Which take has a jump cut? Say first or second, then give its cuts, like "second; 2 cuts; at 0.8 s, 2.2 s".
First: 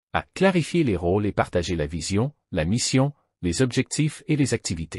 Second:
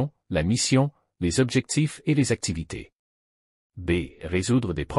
first; 1 cut; at 1.0 s